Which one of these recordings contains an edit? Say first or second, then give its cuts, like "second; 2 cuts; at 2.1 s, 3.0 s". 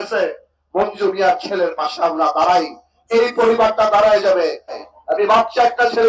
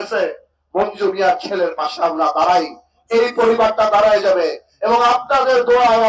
first; 1 cut; at 4.8 s